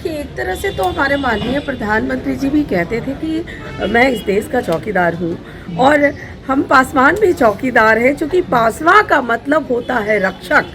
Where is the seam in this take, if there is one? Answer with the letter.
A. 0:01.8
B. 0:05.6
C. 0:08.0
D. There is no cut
D